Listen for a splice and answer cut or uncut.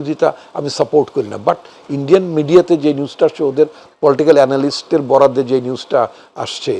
uncut